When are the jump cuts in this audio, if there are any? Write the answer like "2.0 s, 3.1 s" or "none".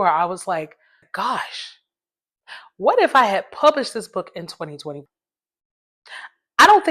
1.0 s